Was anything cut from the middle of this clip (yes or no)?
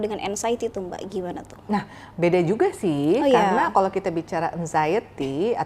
no